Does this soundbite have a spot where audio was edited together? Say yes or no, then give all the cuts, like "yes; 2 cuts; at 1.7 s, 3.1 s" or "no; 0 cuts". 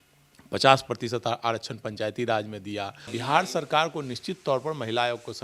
yes; 1 cut; at 3.1 s